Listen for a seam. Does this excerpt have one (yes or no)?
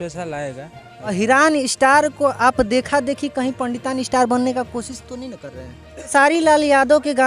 yes